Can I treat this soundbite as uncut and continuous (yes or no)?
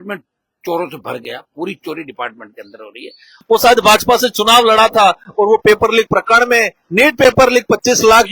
no